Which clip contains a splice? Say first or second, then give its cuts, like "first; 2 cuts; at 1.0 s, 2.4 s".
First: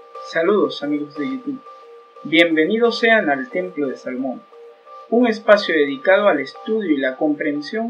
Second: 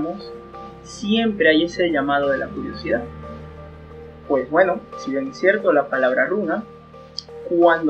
second; 1 cut; at 5.1 s